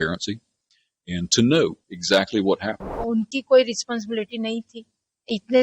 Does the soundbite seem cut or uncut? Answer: cut